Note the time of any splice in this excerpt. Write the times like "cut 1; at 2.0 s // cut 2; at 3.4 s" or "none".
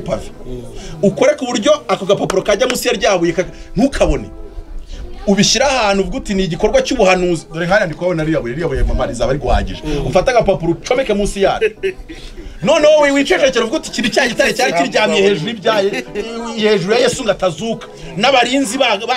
none